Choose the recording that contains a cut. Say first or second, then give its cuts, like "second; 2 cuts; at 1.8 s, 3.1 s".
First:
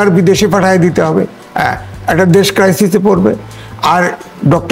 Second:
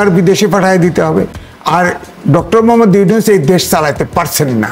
second; 1 cut; at 1.4 s